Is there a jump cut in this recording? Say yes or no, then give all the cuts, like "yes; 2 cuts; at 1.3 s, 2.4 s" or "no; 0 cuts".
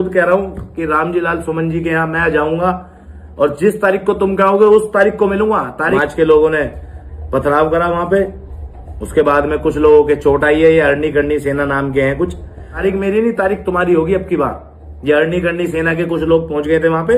yes; 2 cuts; at 6.0 s, 12.7 s